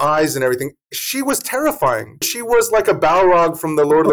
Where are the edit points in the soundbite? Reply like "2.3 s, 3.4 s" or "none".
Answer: 2.2 s

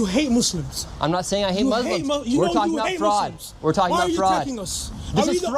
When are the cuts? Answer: none

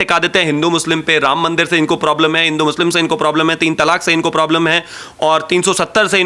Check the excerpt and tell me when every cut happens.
none

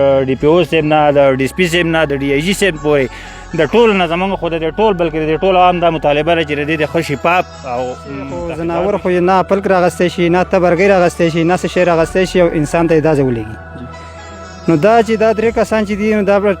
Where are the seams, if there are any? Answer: 8.5 s

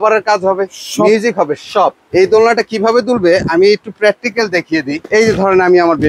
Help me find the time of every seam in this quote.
2.0 s, 5.1 s

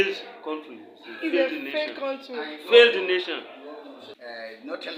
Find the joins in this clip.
4.1 s

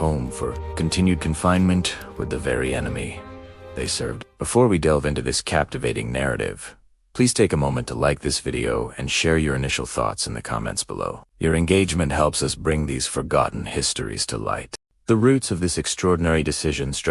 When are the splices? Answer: none

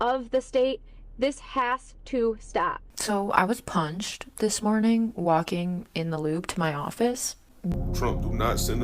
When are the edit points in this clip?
2.8 s, 7.7 s

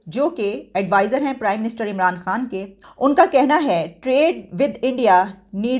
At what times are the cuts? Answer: 2.8 s

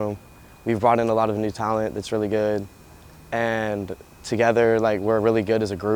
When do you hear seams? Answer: none

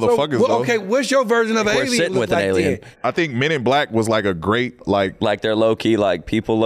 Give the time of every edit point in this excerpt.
2.9 s, 4.7 s

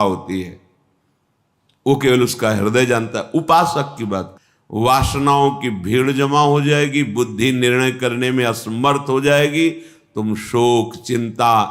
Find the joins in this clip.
4.3 s

